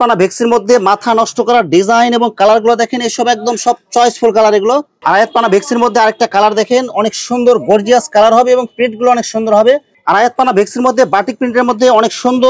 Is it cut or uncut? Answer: cut